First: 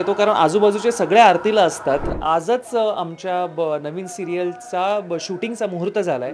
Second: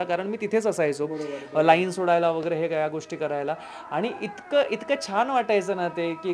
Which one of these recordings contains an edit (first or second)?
first